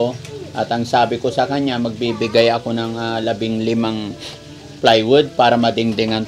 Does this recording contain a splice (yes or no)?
no